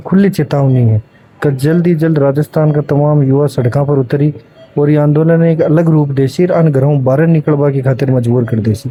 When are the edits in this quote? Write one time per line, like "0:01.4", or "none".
none